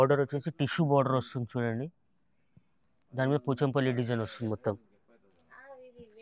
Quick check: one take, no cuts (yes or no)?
yes